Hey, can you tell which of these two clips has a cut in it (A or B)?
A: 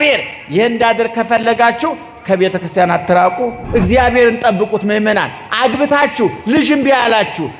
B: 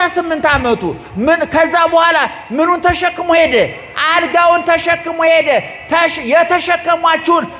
A